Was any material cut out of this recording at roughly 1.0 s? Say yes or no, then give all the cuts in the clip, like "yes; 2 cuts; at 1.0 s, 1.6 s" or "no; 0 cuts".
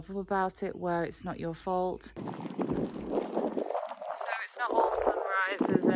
no; 1 cut; at 2.3 s